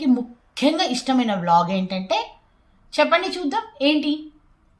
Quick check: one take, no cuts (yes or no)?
yes